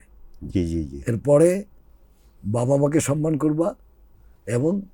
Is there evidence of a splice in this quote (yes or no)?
no